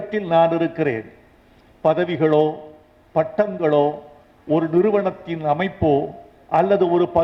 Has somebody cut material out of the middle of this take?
no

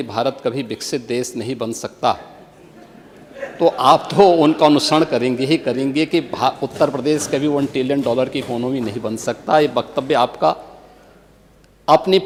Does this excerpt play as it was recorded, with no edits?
yes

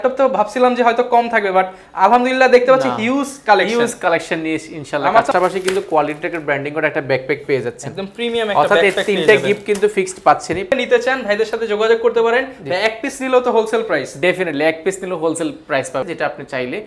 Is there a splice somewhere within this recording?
yes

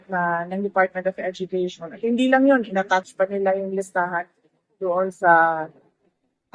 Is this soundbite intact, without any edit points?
yes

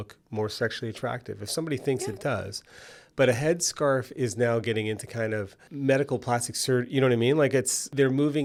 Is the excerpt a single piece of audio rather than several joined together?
yes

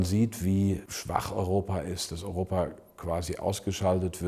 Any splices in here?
yes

